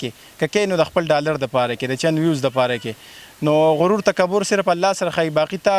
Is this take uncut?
yes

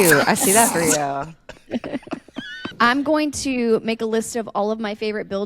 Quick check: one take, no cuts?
no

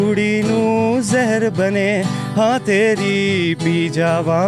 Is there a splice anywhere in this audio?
no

